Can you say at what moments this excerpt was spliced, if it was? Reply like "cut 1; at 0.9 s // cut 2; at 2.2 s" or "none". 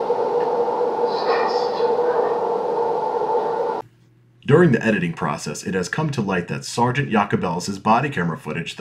cut 1; at 2.9 s // cut 2; at 3.8 s